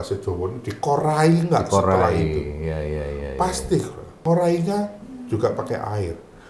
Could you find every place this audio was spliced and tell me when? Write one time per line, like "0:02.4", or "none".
0:04.0

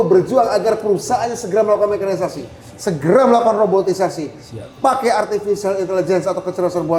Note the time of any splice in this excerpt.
none

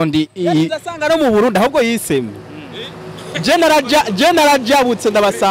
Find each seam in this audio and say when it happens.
none

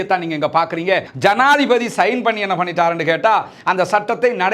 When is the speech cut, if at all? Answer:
0:01.1

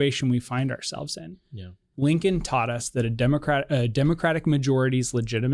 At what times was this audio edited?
0:01.8

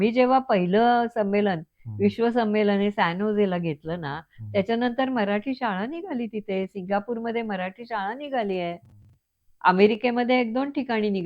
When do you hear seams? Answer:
none

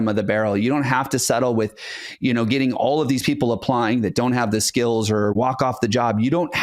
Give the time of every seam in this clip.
0:05.3

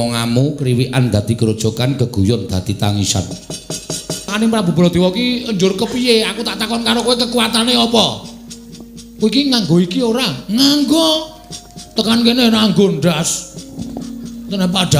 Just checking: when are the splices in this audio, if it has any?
0:04.3

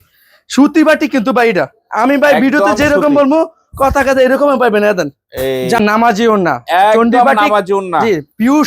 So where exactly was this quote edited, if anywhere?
none

